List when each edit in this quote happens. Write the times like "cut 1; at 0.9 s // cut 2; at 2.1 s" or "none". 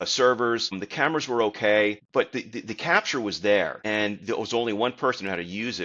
cut 1; at 0.8 s // cut 2; at 2.0 s // cut 3; at 3.8 s